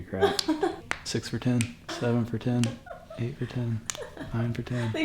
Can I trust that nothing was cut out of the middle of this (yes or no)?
no